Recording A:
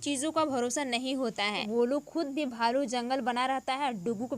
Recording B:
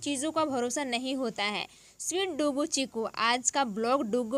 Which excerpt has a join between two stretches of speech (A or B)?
A